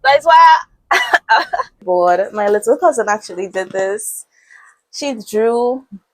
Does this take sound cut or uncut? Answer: cut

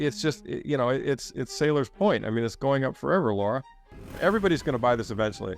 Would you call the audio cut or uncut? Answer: cut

